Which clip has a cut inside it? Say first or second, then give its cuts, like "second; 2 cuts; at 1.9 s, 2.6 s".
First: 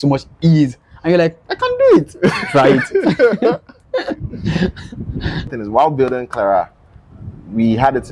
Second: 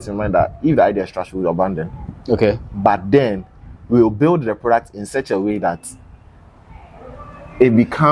first; 1 cut; at 5.6 s